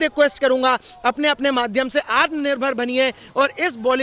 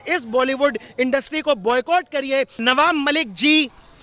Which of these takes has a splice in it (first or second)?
second